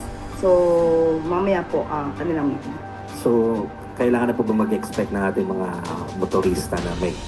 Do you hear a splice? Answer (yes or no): no